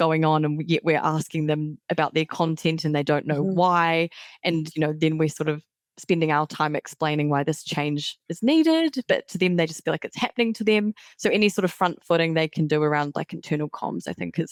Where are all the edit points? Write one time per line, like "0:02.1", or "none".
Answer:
none